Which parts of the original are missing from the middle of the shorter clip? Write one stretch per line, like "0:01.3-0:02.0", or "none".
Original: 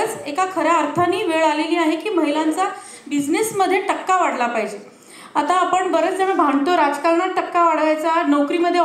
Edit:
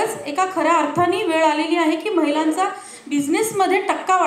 none